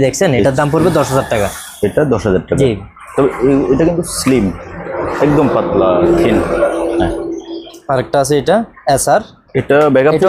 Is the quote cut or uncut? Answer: uncut